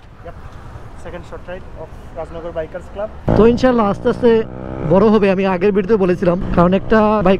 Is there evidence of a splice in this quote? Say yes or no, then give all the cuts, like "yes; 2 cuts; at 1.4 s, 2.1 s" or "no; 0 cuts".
yes; 1 cut; at 3.3 s